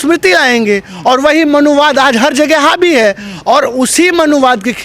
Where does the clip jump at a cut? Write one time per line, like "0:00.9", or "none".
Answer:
none